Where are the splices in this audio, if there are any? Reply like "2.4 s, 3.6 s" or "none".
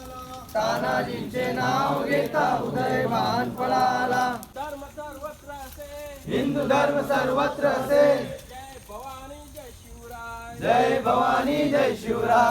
4.5 s